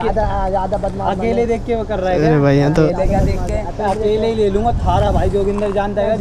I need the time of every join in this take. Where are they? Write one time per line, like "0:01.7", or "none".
none